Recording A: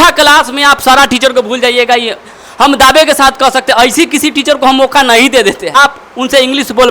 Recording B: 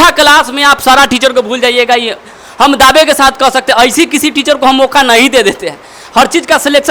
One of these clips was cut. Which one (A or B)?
A